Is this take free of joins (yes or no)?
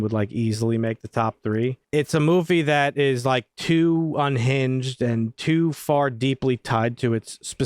no